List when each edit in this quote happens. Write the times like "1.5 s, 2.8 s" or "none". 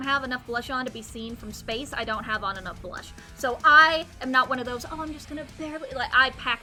none

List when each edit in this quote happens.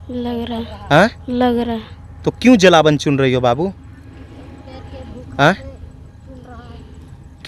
none

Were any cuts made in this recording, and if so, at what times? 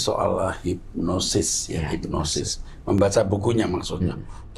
none

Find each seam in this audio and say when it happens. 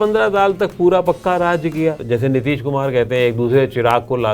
2.0 s

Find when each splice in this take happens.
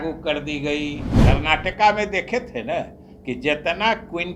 1.1 s

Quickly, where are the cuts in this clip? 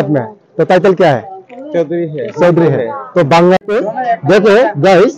3.6 s

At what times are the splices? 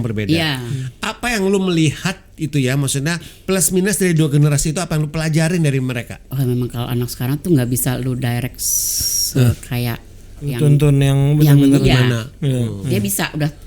6.2 s, 10.5 s, 11.8 s

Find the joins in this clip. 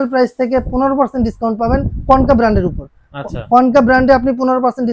none

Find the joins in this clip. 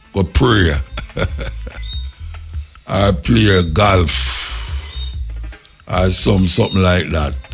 none

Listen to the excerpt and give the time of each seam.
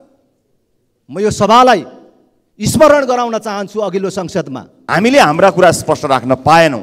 4.8 s

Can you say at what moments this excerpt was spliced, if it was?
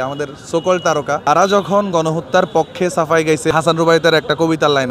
1.3 s, 3.5 s

